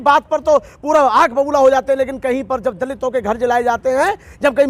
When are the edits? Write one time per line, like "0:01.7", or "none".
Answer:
none